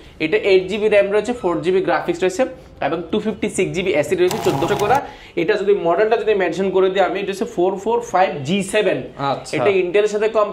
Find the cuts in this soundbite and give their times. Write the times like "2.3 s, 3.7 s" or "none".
4.7 s